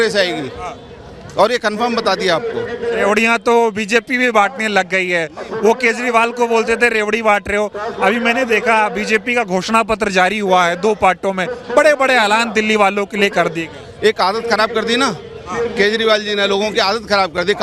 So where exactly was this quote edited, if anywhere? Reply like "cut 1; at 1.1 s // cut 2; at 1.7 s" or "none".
none